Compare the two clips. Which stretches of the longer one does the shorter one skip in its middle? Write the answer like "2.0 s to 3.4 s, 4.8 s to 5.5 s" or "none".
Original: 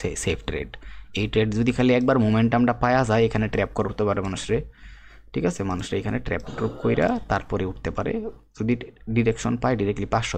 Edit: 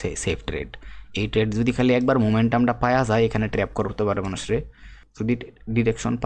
5.0 s to 8.4 s